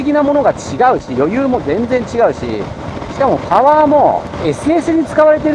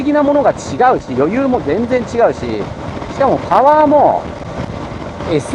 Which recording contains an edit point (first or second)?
first